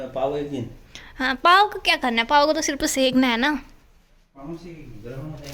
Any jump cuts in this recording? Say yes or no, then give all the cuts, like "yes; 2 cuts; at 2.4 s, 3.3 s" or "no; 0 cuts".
no; 0 cuts